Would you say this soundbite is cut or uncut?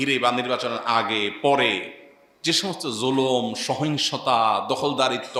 uncut